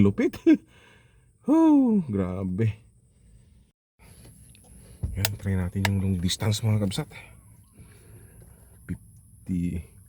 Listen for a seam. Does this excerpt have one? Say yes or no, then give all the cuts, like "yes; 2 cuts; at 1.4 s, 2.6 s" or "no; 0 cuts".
yes; 1 cut; at 3.9 s